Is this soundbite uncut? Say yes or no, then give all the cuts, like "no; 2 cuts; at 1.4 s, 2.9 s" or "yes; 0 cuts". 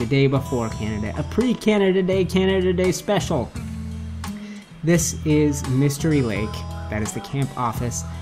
yes; 0 cuts